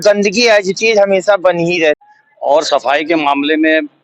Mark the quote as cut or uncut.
cut